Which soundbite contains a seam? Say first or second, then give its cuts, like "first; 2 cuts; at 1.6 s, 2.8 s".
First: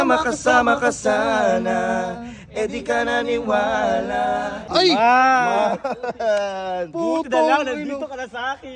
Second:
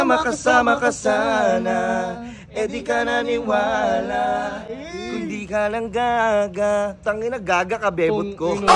first; 1 cut; at 4.6 s